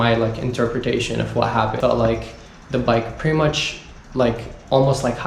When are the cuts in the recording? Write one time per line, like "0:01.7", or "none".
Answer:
0:01.8

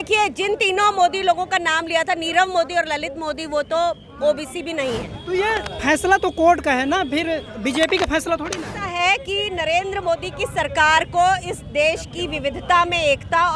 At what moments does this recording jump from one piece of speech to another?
0:05.1
0:09.0

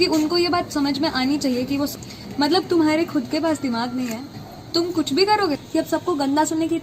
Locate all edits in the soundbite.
0:01.9
0:05.6

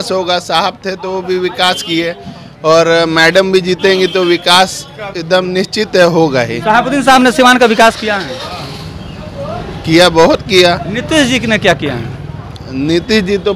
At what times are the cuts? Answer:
none

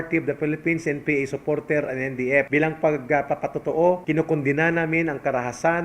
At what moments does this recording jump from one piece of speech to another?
0:02.5
0:04.0

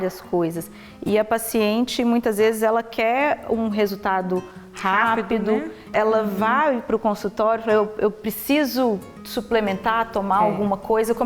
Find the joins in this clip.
0:05.9

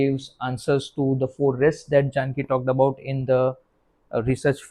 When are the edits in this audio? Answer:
none

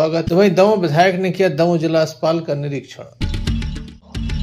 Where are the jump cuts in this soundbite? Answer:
0:03.2

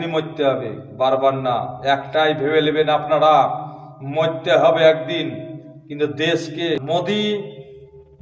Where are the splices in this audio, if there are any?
0:06.8

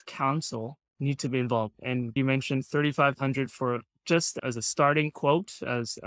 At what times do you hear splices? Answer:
0:02.1
0:04.3

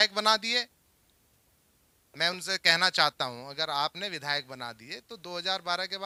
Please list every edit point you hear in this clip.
none

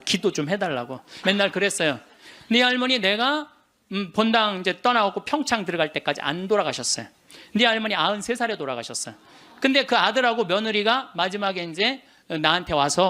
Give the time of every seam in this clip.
0:01.1

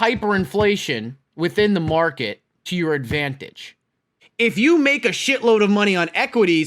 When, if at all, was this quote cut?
0:04.2

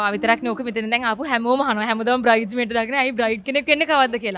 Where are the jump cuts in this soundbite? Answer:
none

